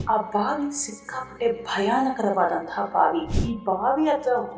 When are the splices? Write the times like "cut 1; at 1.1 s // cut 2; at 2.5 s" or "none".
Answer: cut 1; at 3.3 s